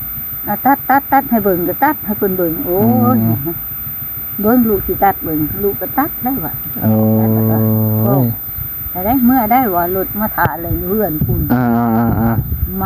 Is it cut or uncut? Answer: uncut